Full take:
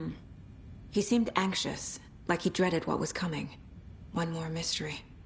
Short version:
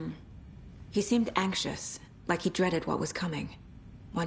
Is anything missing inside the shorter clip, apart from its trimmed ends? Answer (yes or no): no